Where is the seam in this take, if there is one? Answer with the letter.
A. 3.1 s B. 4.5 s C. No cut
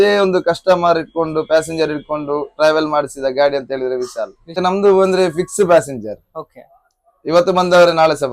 B